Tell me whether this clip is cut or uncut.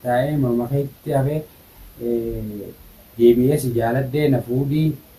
uncut